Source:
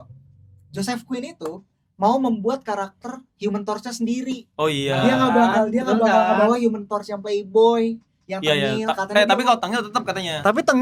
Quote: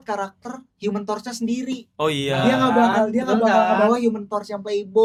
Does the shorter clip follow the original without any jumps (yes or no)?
yes